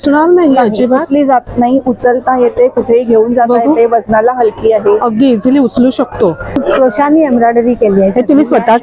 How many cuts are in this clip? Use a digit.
1